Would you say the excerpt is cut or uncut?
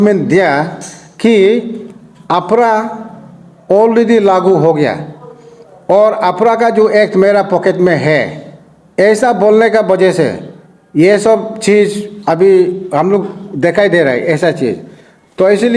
uncut